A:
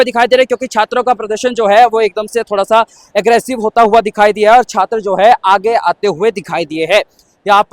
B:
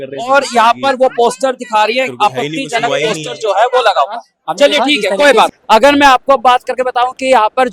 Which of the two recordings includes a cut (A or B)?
B